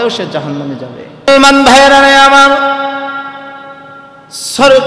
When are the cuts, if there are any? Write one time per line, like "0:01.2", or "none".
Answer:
0:01.3